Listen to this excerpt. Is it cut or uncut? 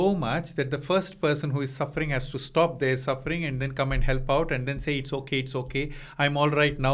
uncut